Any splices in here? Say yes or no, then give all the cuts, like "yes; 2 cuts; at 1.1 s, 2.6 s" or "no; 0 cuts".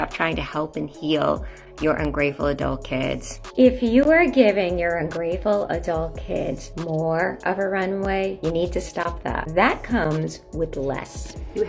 no; 0 cuts